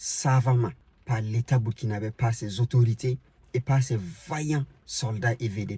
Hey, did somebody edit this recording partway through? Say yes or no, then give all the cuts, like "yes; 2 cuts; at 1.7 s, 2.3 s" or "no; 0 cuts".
yes; 2 cuts; at 0.9 s, 4.8 s